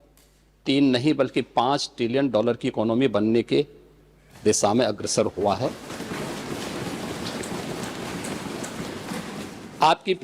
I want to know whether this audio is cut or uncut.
uncut